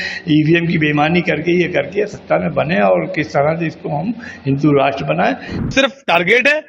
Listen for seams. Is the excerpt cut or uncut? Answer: cut